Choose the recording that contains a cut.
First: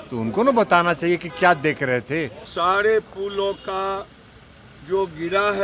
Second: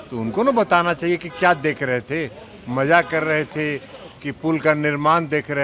first; 1 cut; at 2.4 s

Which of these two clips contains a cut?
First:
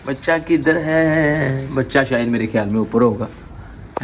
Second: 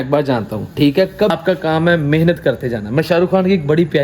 second; 1 cut; at 1.3 s

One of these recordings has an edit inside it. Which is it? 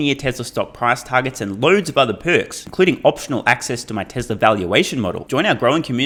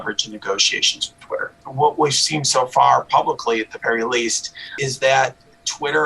second; 2 cuts; at 1.5 s, 4.8 s

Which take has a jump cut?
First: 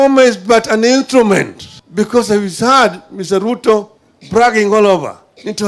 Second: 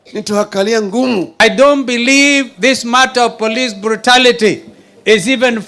second; 1 cut; at 1.3 s

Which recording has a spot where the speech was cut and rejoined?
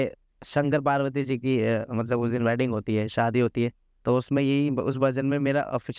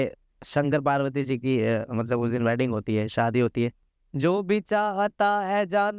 second; 1 cut; at 3.9 s

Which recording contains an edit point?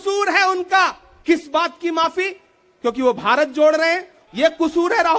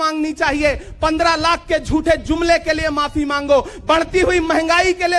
first; 2 cuts; at 1.1 s, 4.1 s

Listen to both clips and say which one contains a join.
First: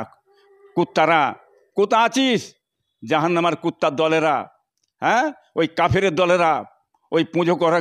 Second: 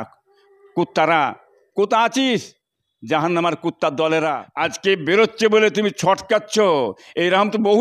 second; 1 cut; at 4.5 s

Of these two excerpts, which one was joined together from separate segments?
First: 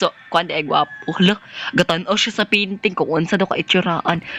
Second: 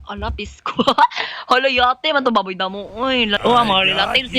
second; 1 cut; at 3.4 s

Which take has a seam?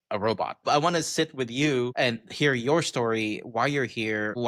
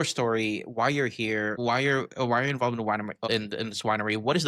second; 1 cut; at 3.2 s

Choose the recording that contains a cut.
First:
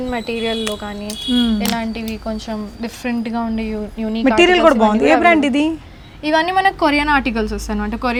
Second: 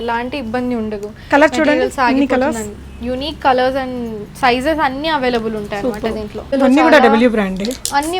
second; 1 cut; at 6.5 s

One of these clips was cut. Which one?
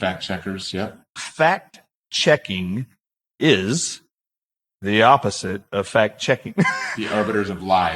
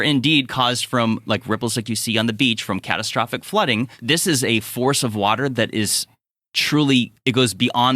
second; 1 cut; at 4.0 s

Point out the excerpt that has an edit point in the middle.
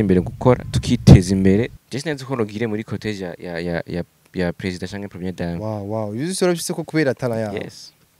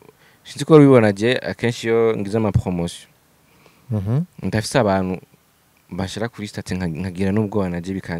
first; 1 cut; at 1.8 s

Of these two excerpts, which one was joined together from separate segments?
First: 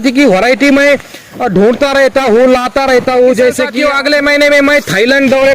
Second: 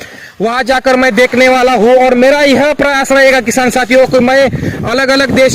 first; 1 cut; at 3.7 s

